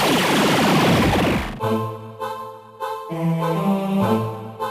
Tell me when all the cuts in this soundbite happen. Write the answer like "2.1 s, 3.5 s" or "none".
1.5 s